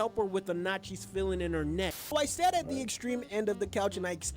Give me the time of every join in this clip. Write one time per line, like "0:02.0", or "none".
0:02.1